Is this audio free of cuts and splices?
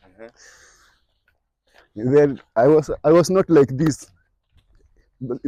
yes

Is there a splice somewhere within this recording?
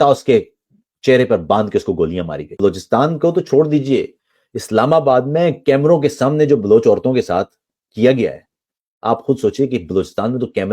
yes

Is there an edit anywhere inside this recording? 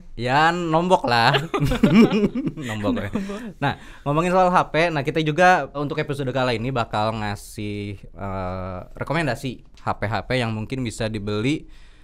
yes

